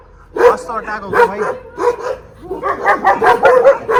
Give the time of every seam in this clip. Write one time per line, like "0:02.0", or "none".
none